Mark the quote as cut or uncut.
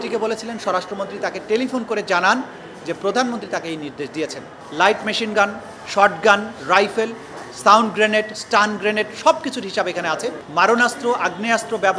cut